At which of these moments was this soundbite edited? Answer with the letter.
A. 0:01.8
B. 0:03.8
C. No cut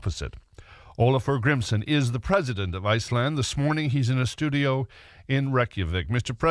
A